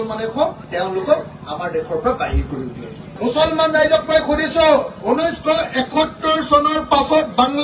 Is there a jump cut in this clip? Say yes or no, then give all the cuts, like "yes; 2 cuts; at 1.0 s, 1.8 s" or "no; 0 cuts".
yes; 2 cuts; at 3.1 s, 4.9 s